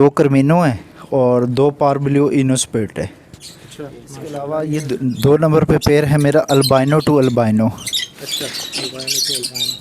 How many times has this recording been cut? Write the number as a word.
one